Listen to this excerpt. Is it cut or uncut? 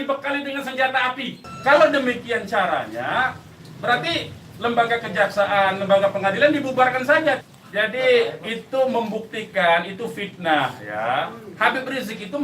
cut